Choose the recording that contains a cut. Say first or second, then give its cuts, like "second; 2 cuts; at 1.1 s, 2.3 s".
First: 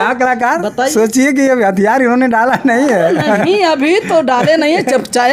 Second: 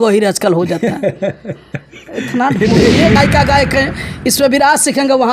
second; 1 cut; at 3.2 s